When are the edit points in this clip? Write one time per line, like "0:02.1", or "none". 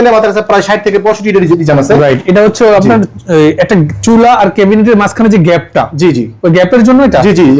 none